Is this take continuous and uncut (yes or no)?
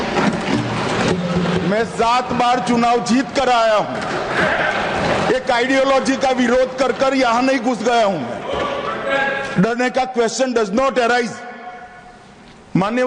yes